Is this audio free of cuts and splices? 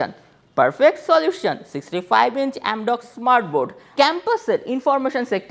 no; 1 cut; at 3.9 s

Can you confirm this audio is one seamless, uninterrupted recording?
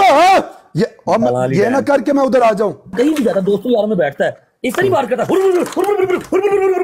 no; 1 cut; at 2.9 s

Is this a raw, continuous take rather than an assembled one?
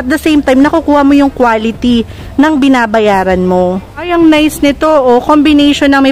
yes; 0 cuts

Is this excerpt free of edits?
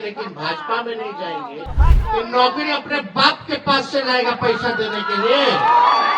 no; 1 cut; at 1.7 s

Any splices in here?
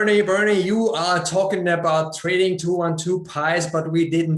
no; 0 cuts

